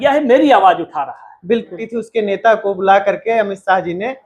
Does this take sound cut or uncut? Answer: cut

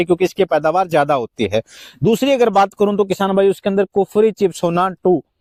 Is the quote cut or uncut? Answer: uncut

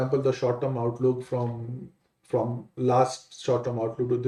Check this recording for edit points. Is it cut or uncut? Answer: uncut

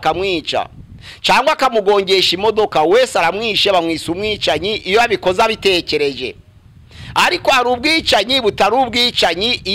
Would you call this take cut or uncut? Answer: uncut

